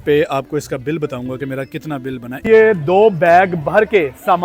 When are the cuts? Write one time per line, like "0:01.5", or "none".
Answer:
0:02.3